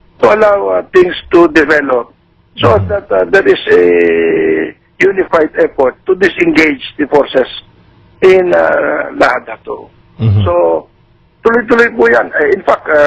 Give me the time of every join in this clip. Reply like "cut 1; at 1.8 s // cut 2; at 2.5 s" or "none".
cut 1; at 6.9 s